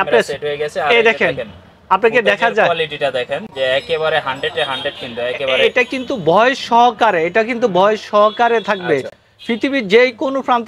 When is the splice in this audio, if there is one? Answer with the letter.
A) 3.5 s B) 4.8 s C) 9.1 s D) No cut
D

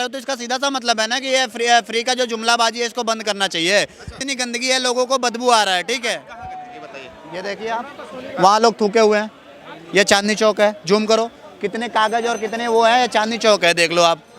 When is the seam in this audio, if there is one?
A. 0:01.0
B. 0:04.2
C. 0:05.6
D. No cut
B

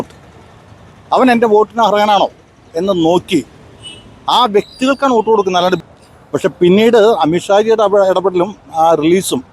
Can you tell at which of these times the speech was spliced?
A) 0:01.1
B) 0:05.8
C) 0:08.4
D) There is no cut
B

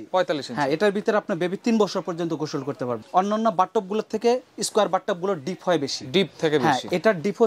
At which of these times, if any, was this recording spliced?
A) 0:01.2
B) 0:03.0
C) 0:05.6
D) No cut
B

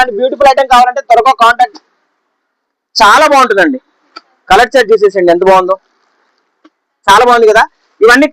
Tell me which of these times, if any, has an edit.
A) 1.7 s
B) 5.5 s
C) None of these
A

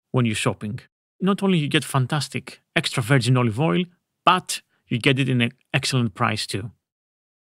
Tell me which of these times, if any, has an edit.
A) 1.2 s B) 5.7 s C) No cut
A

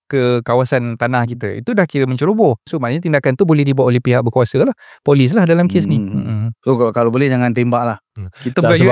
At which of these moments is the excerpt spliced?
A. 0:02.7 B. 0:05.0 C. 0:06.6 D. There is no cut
A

